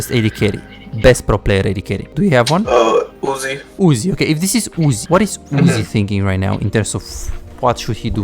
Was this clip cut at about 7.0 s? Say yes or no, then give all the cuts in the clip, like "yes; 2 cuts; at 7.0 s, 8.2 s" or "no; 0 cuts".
no; 3 cuts; at 2.0 s, 3.2 s, 5.0 s